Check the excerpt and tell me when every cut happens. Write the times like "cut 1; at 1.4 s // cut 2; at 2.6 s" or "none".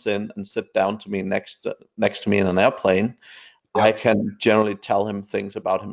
none